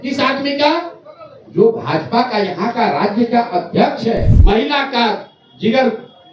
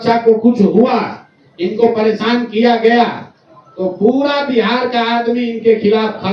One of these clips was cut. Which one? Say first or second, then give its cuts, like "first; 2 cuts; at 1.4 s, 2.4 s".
first; 1 cut; at 4.3 s